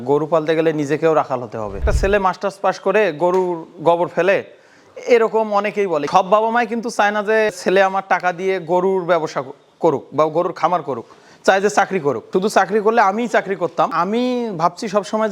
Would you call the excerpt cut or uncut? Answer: cut